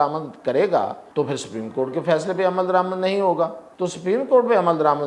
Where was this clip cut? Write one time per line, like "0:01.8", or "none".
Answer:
0:01.0
0:03.6